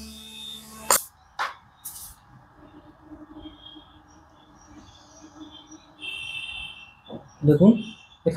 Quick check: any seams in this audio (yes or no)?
yes